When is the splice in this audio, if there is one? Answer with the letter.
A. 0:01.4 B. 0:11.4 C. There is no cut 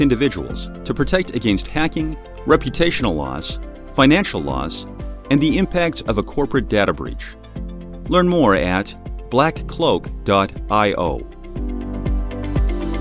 B